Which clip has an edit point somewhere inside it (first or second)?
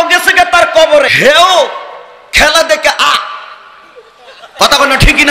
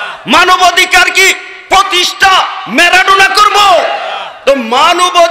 first